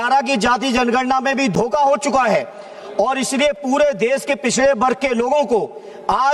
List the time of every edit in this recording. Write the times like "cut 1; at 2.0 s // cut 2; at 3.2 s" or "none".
none